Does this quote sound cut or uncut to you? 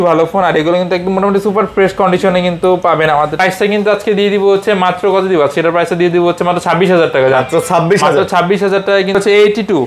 cut